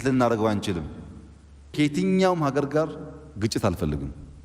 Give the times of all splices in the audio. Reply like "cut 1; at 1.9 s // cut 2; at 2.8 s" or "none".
cut 1; at 1.7 s